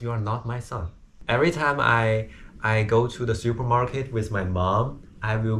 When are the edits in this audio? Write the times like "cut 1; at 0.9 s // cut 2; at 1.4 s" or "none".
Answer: cut 1; at 1.1 s